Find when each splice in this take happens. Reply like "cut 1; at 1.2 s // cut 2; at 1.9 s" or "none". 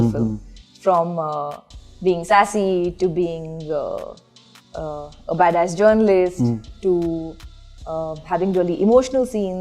none

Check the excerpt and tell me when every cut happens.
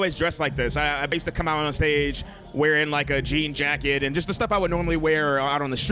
cut 1; at 1.1 s

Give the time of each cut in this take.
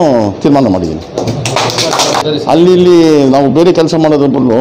cut 1; at 2.2 s

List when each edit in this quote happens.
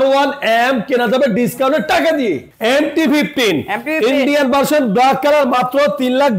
cut 1; at 2.5 s

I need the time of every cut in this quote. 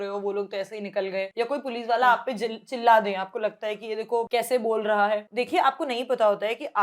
cut 1; at 1.3 s // cut 2; at 4.3 s // cut 3; at 5.3 s

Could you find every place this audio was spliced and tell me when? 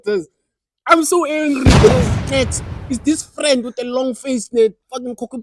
cut 1; at 2.0 s

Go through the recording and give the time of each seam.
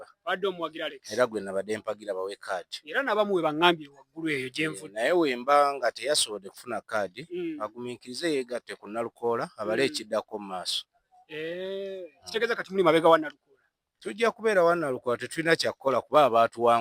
none

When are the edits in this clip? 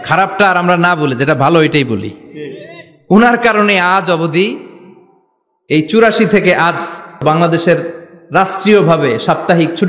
cut 1; at 7.2 s

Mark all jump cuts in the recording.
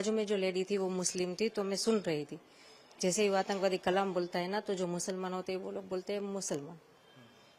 none

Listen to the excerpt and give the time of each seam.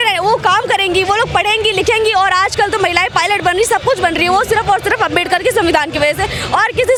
none

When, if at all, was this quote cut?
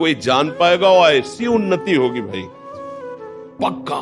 none

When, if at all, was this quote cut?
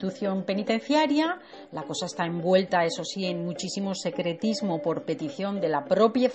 cut 1; at 4.6 s

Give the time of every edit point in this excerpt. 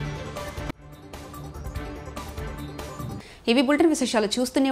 none

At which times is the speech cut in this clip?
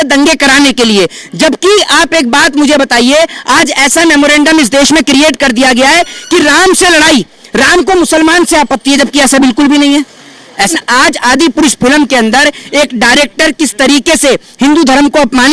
cut 1; at 10.7 s

